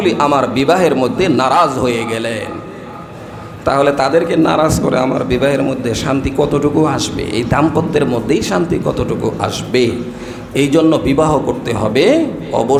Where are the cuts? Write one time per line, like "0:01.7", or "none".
none